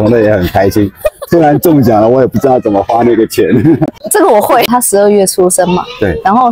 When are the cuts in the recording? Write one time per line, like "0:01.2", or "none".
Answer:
0:04.7